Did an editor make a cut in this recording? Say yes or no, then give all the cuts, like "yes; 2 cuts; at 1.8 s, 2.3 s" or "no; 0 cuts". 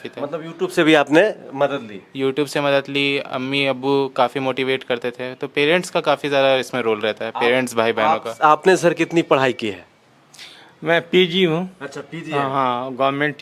no; 0 cuts